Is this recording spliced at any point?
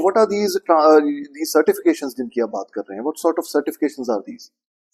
no; 0 cuts

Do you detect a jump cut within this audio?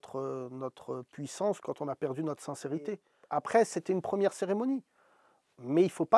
yes; 1 cut; at 3.1 s

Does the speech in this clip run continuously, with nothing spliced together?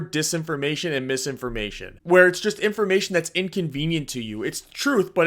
no; 1 cut; at 1.9 s

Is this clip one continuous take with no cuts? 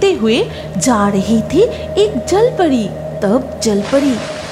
yes; 0 cuts

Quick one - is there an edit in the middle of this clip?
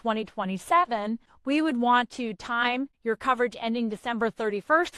yes; 2 cuts; at 1.3 s, 2.9 s

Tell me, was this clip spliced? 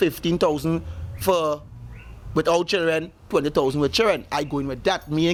no; 0 cuts

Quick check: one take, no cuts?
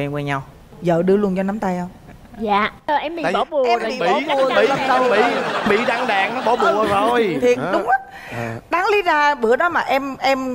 yes; 0 cuts

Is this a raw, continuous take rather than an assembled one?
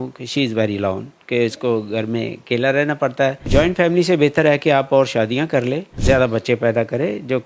no; 2 cuts; at 3.4 s, 5.9 s

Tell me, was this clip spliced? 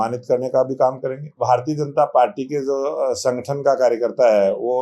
yes; 1 cut; at 1.4 s

